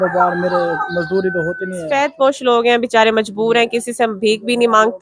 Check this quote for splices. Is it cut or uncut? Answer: cut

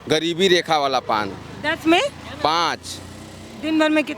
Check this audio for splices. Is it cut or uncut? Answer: uncut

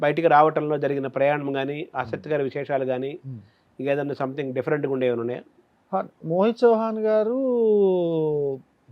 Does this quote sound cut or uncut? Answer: uncut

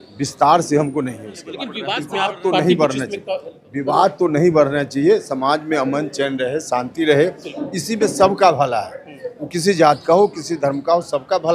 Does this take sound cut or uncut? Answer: cut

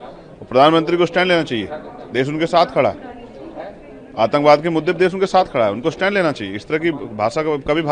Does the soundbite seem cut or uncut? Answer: uncut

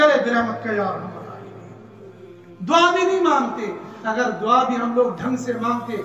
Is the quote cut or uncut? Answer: uncut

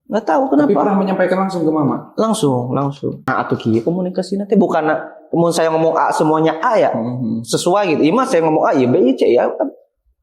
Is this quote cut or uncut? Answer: cut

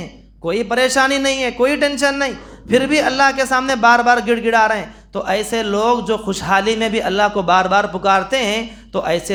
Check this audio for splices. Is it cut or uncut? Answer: uncut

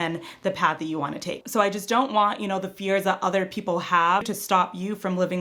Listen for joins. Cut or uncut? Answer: cut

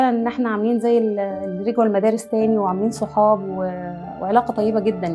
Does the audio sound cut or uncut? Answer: uncut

